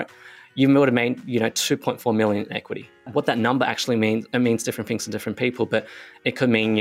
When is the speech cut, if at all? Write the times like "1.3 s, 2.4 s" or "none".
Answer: 3.1 s